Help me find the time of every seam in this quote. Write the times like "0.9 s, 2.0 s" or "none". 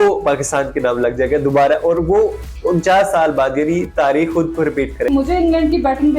5.1 s